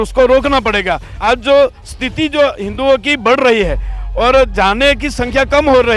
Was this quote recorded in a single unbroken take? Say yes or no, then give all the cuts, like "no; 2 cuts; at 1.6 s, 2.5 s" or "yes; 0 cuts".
no; 1 cut; at 1.1 s